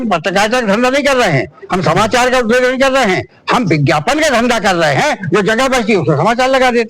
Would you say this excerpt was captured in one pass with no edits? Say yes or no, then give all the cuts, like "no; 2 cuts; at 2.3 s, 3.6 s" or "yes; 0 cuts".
yes; 0 cuts